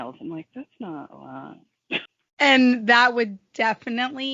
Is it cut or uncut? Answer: cut